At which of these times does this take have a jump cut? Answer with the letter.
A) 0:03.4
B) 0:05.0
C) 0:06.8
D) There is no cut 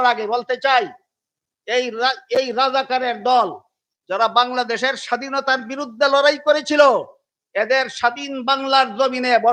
D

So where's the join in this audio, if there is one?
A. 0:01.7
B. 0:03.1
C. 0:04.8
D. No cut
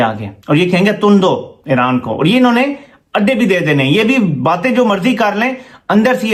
D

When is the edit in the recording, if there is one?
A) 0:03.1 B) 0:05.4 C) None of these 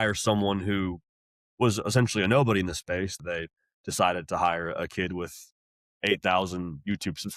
A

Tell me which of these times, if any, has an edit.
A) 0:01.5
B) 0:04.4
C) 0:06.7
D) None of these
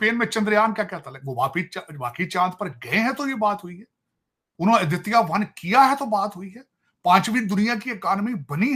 D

